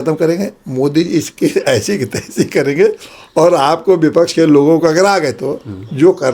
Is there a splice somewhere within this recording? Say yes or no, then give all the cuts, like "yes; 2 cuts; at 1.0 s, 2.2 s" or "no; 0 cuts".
no; 0 cuts